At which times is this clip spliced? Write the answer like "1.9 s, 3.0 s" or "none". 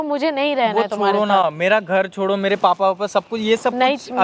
none